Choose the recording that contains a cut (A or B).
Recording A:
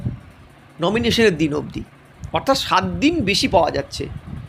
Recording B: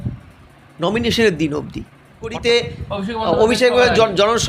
B